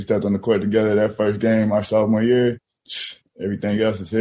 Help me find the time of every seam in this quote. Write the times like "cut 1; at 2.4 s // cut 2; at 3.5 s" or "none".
none